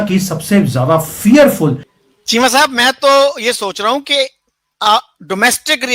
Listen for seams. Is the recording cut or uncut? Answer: cut